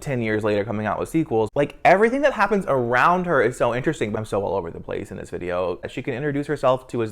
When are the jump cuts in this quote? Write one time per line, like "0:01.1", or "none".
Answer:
0:01.5
0:04.1
0:05.9